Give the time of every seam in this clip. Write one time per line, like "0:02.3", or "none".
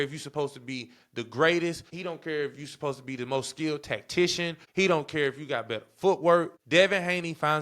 0:01.9
0:04.6
0:06.6